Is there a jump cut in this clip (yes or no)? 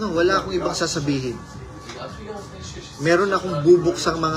no